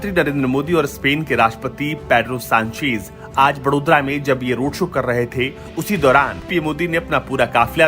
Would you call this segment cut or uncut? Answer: cut